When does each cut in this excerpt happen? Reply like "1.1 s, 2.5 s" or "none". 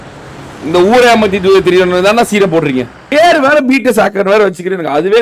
3.1 s